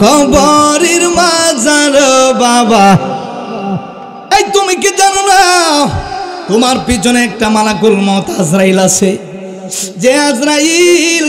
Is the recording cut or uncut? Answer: cut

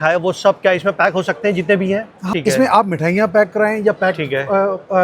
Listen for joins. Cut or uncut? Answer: cut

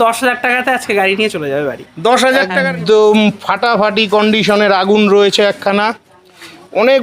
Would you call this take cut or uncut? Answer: cut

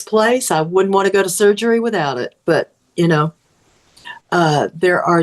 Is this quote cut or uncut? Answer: uncut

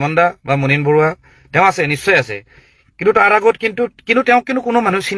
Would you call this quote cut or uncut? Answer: uncut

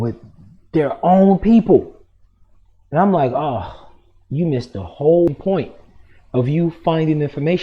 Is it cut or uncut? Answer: cut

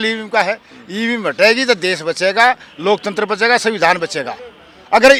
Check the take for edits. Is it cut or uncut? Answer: uncut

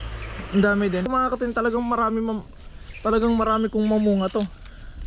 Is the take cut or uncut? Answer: cut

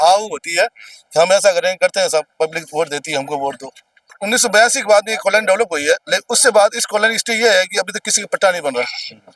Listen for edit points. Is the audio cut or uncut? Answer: uncut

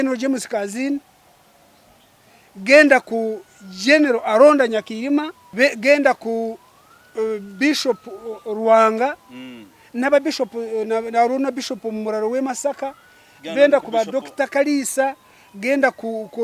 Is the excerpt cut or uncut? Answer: cut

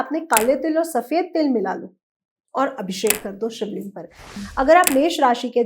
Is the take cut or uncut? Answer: cut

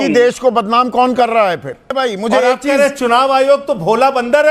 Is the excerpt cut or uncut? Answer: cut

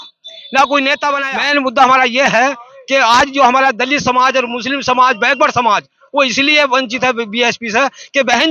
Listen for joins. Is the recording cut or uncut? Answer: cut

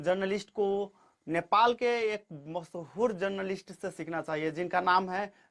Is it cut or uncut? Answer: uncut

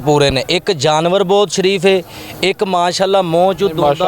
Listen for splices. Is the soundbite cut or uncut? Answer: uncut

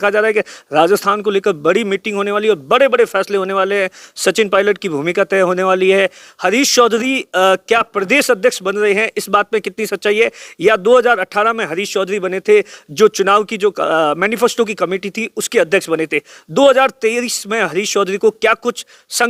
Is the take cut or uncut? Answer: uncut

